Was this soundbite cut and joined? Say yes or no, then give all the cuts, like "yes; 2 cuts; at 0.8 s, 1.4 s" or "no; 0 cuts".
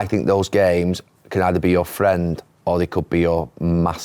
no; 0 cuts